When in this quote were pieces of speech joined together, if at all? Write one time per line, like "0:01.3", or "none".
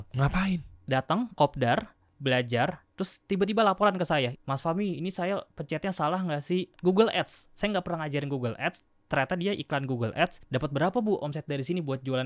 0:02.0
0:04.3
0:06.7
0:10.4

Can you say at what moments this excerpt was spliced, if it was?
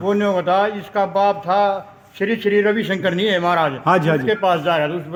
none

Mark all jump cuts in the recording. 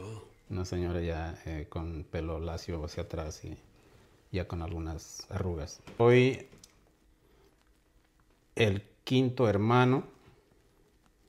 0:06.0

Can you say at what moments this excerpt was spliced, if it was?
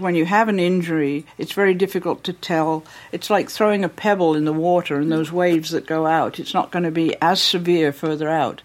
none

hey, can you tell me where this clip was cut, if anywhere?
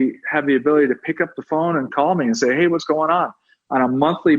0:01.9

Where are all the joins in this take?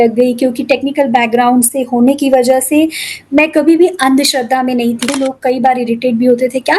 0:05.0

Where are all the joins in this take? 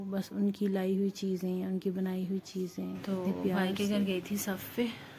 none

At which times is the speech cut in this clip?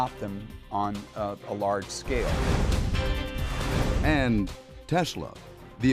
0:01.0

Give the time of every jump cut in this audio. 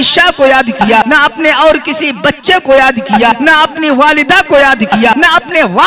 0:01.1
0:03.3
0:05.1

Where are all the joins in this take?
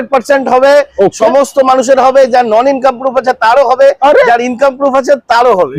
none

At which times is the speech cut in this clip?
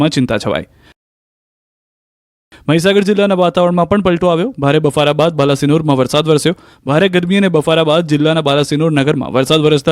0:03.3

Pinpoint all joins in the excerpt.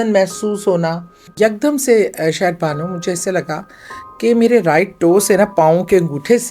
0:01.2

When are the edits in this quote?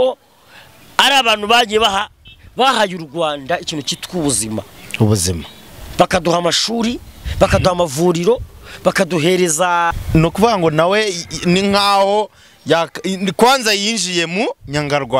0:09.9

